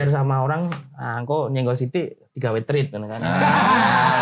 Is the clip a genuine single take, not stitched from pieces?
yes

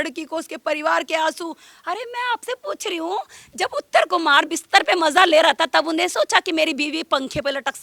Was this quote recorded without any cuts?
yes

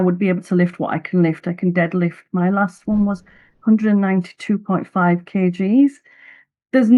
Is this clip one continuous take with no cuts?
yes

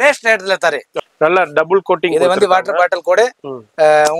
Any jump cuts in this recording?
yes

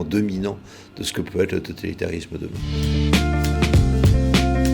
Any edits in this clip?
yes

